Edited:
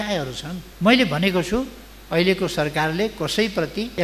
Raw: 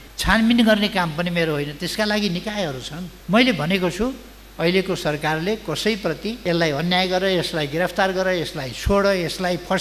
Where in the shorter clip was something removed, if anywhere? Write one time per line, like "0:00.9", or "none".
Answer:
none